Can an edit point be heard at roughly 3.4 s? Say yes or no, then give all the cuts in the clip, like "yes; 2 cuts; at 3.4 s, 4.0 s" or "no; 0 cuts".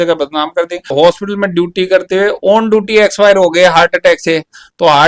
no; 1 cut; at 0.9 s